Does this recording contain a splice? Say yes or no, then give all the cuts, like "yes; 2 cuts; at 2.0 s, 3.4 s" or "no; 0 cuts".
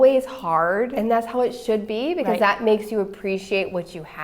yes; 1 cut; at 0.9 s